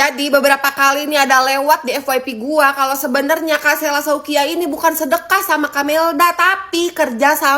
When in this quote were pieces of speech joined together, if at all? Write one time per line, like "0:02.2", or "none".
none